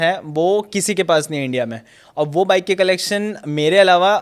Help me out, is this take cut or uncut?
uncut